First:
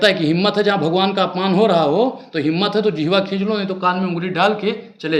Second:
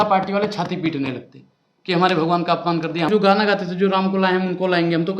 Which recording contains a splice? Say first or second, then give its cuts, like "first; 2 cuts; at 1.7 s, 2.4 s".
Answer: second; 1 cut; at 3.1 s